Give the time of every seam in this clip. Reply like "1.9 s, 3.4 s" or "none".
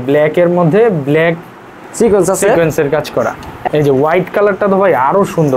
3.5 s